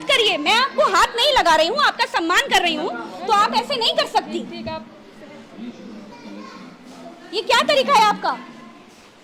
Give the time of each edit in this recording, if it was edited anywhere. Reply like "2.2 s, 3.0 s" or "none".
none